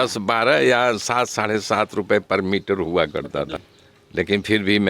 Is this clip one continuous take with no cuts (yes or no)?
no